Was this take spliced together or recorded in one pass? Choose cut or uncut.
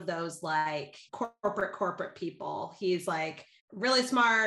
cut